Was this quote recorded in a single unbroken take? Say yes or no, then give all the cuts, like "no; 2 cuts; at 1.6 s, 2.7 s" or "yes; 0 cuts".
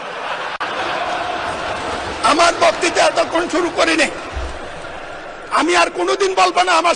yes; 0 cuts